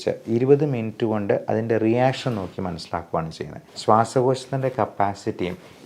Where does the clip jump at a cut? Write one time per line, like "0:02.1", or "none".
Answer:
0:03.6